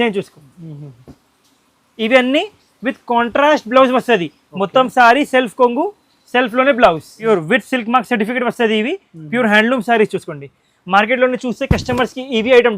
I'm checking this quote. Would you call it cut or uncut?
cut